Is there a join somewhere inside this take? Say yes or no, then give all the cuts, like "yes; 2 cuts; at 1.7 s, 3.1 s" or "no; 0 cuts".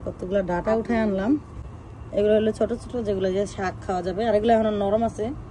no; 0 cuts